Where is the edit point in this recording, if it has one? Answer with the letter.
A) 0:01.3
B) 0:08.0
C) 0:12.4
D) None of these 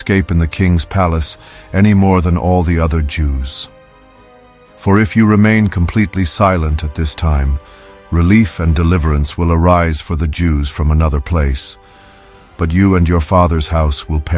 D